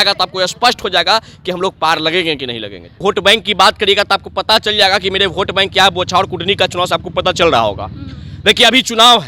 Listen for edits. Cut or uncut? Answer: cut